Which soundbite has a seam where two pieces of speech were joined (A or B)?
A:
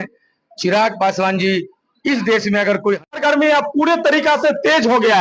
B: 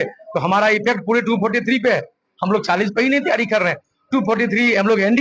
A